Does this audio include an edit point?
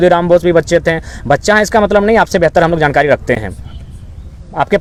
no; 0 cuts

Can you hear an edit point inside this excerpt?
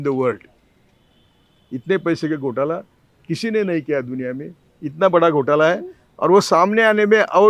no; 0 cuts

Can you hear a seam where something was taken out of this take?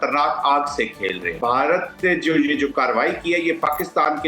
yes; 1 cut; at 1.3 s

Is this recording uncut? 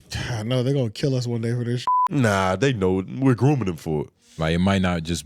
no; 1 cut; at 4.2 s

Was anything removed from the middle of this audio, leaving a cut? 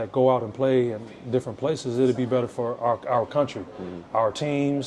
no; 0 cuts

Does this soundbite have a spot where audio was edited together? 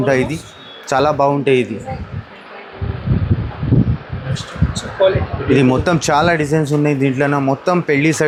no; 0 cuts

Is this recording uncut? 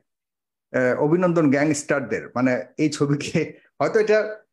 yes; 0 cuts

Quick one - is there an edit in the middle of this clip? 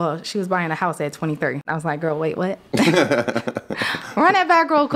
yes; 1 cut; at 1.6 s

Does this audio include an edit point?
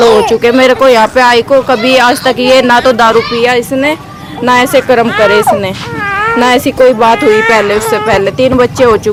no; 0 cuts

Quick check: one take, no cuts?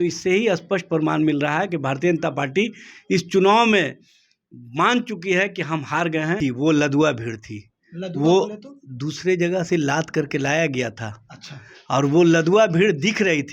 no; 1 cut; at 6.4 s

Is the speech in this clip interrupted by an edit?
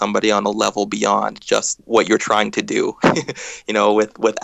yes; 1 cut; at 1.8 s

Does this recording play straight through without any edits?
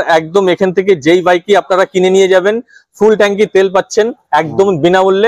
yes; 0 cuts

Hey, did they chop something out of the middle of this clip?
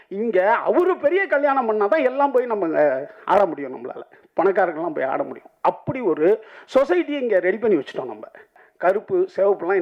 yes; 1 cut; at 8.6 s

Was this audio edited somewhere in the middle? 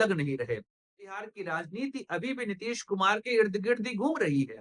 yes; 1 cut; at 1.1 s

